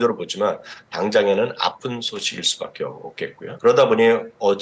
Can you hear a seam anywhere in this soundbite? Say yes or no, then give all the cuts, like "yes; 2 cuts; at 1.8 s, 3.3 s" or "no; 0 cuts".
yes; 1 cut; at 3.6 s